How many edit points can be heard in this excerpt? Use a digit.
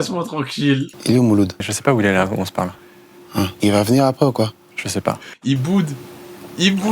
4